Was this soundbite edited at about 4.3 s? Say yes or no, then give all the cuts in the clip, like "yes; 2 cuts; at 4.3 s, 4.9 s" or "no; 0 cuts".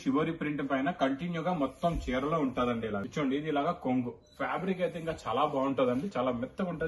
no; 1 cut; at 3.0 s